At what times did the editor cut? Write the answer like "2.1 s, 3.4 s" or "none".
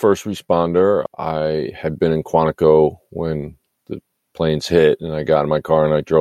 1.1 s